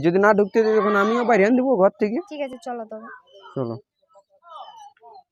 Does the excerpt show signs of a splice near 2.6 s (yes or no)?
no